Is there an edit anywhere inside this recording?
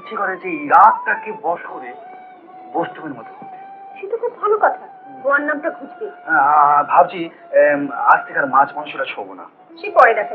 no; 0 cuts

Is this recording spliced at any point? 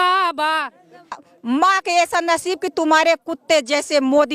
yes; 1 cut; at 1.1 s

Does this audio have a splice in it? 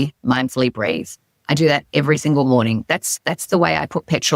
no; 0 cuts

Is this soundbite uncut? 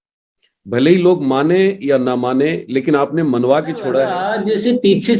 no; 1 cut; at 4.2 s

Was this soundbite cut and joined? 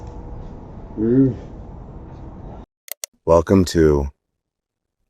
yes; 1 cut; at 2.7 s

